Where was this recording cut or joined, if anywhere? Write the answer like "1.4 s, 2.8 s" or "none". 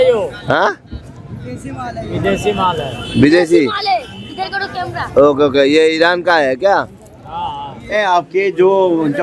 7.8 s